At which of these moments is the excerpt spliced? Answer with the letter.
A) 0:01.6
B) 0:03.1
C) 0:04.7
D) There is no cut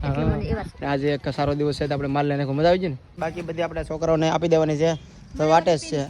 B